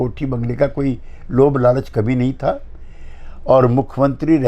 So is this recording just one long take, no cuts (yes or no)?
yes